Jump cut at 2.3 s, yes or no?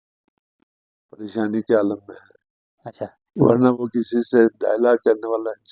no